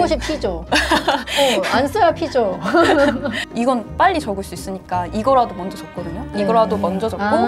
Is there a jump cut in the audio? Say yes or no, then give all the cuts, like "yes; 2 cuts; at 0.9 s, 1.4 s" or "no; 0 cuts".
yes; 1 cut; at 3.4 s